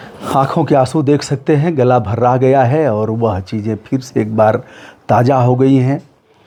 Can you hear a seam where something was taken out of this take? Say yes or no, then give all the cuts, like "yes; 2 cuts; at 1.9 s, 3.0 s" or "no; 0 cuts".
no; 0 cuts